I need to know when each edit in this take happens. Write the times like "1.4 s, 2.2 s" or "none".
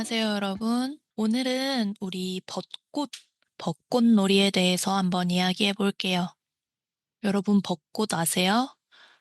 1.0 s